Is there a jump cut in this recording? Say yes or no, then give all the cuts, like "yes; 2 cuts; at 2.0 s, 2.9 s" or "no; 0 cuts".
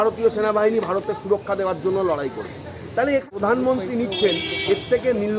yes; 1 cut; at 3.3 s